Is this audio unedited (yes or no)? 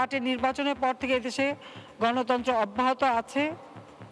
yes